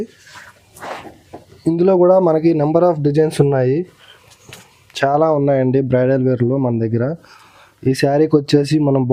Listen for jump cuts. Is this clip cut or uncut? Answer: uncut